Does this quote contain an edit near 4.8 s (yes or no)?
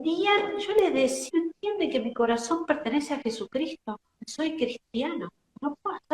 no